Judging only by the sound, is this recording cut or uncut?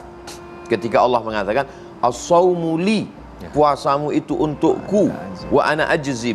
uncut